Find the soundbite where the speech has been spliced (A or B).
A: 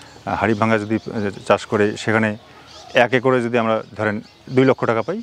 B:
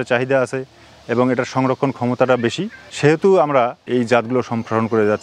B